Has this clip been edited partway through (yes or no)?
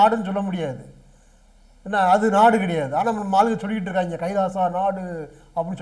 no